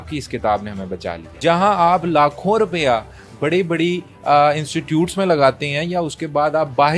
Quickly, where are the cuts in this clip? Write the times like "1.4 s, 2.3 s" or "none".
1.2 s